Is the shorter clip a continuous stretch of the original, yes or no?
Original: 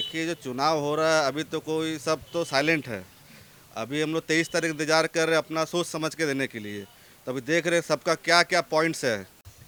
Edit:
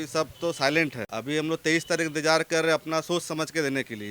no